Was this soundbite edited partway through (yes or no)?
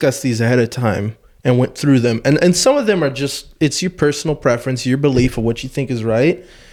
no